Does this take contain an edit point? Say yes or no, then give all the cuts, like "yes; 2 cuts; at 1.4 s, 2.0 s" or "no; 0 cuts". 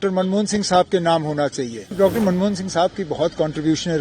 yes; 1 cut; at 1.9 s